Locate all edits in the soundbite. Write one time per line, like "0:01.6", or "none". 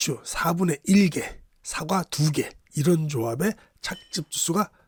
none